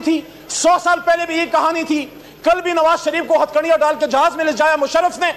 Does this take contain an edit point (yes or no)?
no